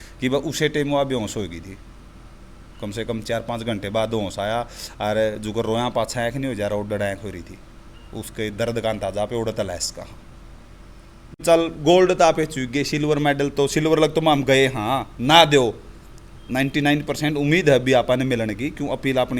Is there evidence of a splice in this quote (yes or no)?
yes